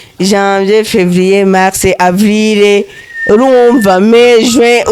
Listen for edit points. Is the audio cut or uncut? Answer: uncut